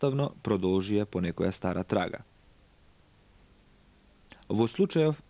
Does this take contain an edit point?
yes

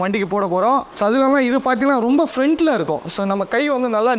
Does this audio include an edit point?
yes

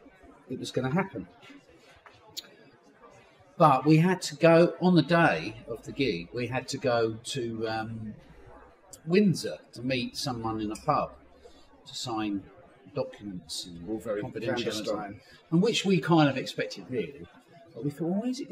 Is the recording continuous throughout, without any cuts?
yes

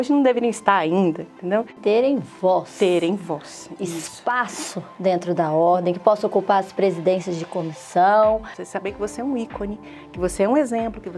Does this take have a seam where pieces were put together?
yes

